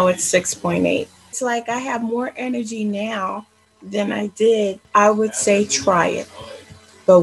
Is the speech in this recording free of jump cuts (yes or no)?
no